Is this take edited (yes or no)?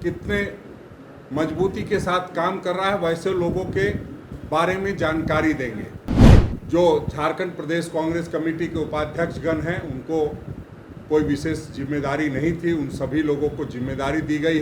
yes